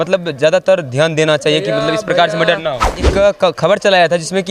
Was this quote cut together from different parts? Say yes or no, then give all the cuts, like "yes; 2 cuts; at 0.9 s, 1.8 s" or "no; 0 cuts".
yes; 1 cut; at 3.0 s